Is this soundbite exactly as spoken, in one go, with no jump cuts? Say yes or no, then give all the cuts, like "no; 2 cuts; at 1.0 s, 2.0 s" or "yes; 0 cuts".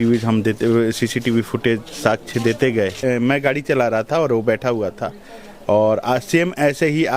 no; 1 cut; at 3.0 s